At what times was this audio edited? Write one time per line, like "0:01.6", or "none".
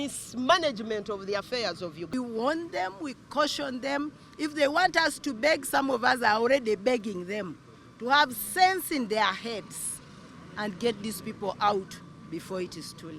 0:02.1